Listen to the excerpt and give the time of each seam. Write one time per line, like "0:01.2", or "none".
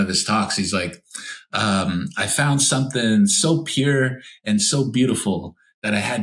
none